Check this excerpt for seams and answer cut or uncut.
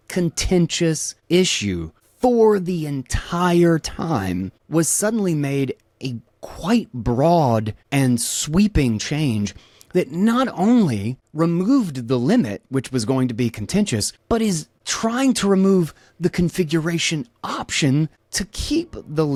uncut